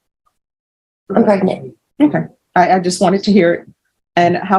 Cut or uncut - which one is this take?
uncut